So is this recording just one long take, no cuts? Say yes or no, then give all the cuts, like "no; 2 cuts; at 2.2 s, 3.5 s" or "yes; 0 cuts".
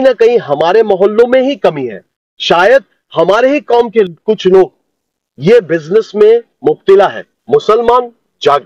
no; 1 cut; at 7.3 s